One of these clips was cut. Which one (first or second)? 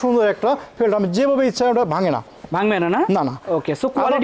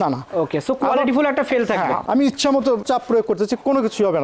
second